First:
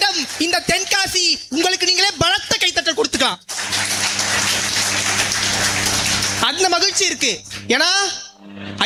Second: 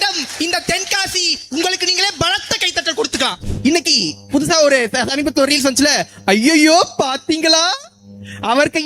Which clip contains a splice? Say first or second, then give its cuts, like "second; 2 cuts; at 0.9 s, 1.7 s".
second; 1 cut; at 3.5 s